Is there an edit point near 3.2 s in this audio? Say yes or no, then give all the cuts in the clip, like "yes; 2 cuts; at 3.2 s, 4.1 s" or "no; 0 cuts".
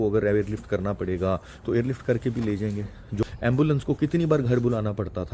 yes; 1 cut; at 3.2 s